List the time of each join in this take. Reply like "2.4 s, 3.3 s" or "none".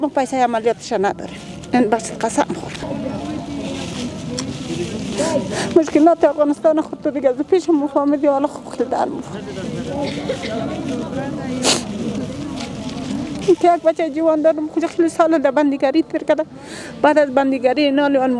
2.8 s